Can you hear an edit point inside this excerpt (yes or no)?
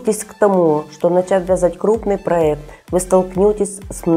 no